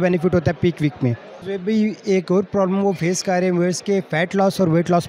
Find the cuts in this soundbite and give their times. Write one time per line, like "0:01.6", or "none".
0:01.3